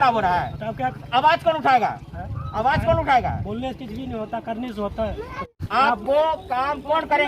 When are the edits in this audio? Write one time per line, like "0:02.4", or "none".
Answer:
0:05.4